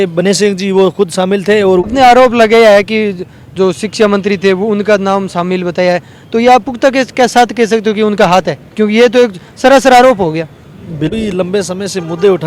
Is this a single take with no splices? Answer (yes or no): no